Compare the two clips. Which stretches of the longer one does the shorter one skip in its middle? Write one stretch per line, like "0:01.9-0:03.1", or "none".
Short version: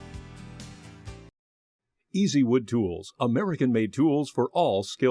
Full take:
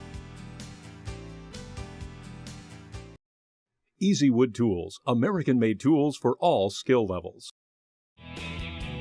0:01.0-0:02.8